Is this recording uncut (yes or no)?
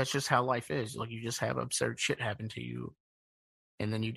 yes